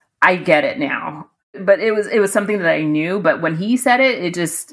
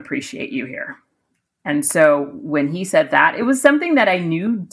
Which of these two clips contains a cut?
first; 1 cut; at 1.6 s

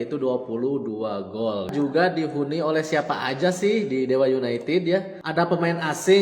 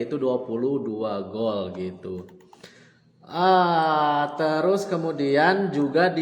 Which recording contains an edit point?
first; 2 cuts; at 1.7 s, 5.2 s

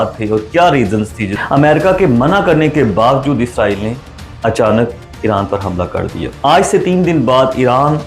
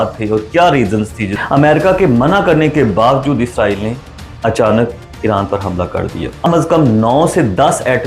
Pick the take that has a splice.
second; 1 cut; at 6.5 s

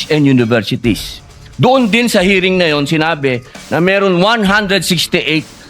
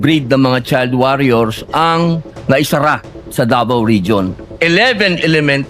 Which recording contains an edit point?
second; 1 cut; at 4.4 s

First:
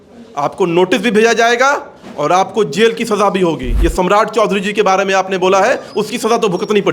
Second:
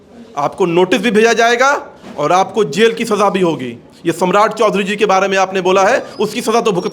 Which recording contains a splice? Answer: first; 1 cut; at 3.7 s

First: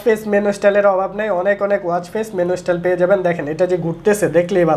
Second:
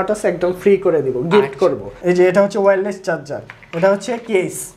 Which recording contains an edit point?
second; 1 cut; at 1.9 s

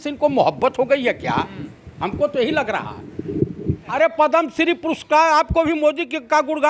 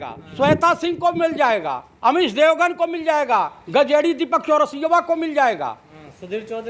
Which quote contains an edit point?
first; 1 cut; at 3.9 s

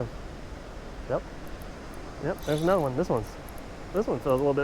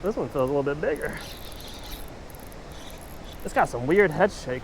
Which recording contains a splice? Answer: first; 1 cut; at 1.0 s

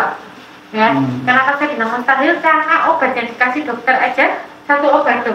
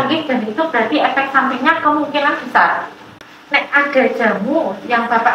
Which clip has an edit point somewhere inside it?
second; 1 cut; at 3.2 s

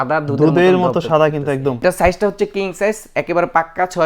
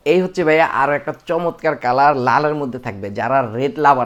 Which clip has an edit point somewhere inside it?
first; 1 cut; at 1.8 s

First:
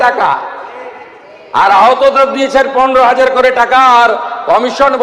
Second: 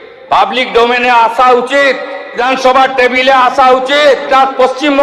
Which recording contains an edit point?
second; 2 cuts; at 2.3 s, 4.3 s

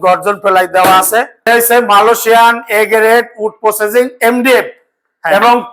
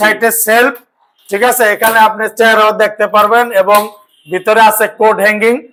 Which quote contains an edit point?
first; 1 cut; at 1.4 s

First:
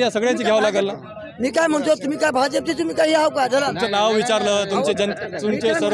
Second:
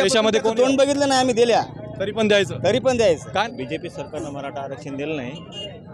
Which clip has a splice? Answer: second; 1 cut; at 3.5 s

